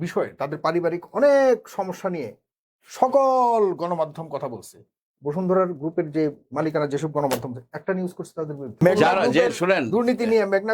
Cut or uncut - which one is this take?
cut